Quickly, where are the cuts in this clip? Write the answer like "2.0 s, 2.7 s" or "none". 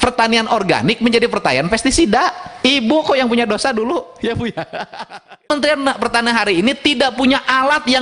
5.5 s